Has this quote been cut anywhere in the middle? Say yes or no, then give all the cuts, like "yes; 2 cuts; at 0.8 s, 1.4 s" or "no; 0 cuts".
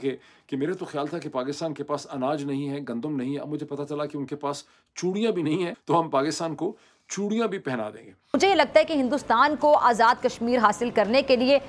yes; 2 cuts; at 5.8 s, 8.3 s